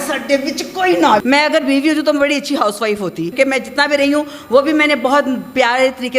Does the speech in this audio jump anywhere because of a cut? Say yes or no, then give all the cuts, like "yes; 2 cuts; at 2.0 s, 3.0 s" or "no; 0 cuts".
yes; 2 cuts; at 1.2 s, 3.3 s